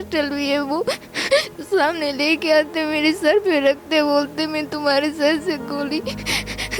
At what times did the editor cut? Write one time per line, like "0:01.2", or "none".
none